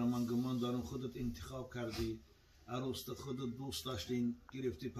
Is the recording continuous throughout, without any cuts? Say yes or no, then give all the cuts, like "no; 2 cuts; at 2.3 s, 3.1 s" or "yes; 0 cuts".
yes; 0 cuts